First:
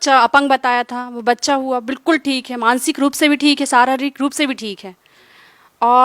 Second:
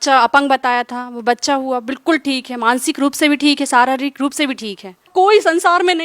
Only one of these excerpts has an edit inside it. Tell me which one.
second; 1 cut; at 5.1 s

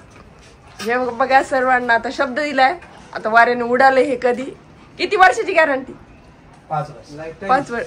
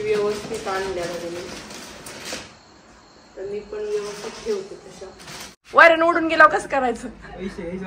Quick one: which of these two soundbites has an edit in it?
second; 1 cut; at 5.6 s

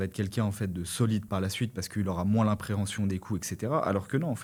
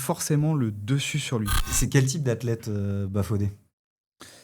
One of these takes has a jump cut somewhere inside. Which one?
second; 1 cut; at 1.7 s

